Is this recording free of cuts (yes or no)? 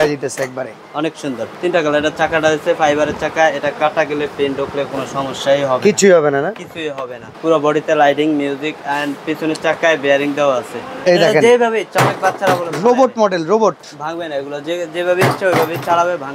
no